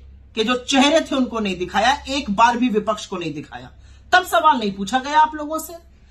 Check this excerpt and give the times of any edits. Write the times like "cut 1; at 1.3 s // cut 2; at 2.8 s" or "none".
none